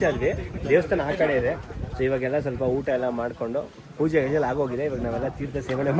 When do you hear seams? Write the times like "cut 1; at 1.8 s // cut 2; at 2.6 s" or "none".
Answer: none